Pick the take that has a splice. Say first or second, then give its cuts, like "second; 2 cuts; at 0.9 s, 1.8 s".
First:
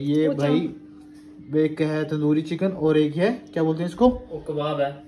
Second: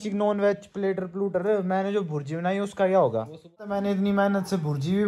second; 1 cut; at 3.8 s